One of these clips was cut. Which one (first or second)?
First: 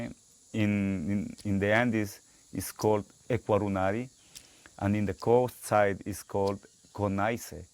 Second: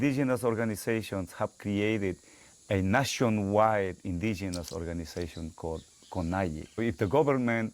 second